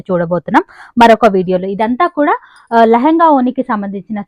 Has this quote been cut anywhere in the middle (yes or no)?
no